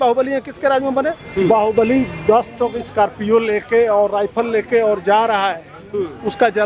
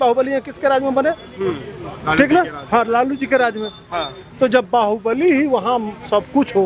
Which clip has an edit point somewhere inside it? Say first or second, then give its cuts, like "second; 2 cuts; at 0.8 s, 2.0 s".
first; 1 cut; at 1.2 s